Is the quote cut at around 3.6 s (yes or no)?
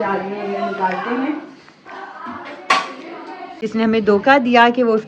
yes